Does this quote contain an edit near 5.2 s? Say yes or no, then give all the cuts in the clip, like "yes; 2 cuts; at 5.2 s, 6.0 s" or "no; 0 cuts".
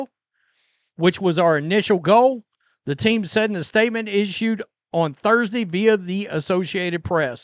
yes; 1 cut; at 5.2 s